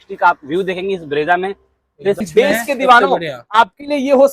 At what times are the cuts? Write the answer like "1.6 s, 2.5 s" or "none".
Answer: 2.3 s